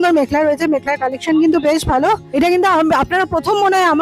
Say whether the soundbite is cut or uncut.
cut